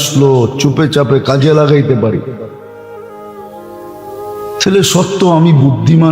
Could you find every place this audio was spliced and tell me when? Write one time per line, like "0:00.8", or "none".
0:02.5
0:04.0